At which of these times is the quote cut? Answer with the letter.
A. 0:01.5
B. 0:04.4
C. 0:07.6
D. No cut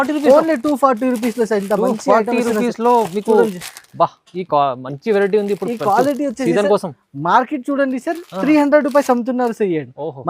D